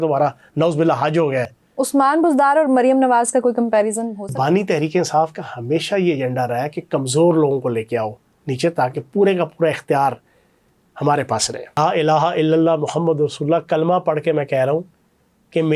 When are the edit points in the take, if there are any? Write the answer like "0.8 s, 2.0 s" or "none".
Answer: 1.6 s, 4.3 s, 11.8 s

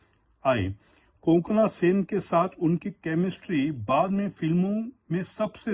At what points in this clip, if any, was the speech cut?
none

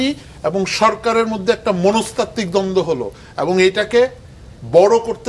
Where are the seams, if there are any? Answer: none

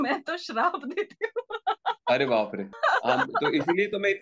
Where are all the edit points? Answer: 2.7 s

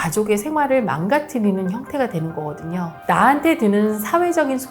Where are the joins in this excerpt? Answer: 3.0 s

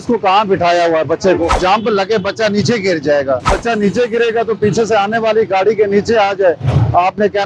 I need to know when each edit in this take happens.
1.6 s, 3.5 s

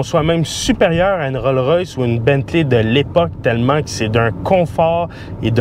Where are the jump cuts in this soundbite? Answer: none

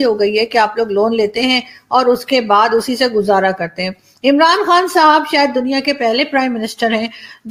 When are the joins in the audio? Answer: none

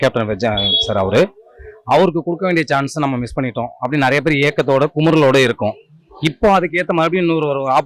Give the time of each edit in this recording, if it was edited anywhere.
none

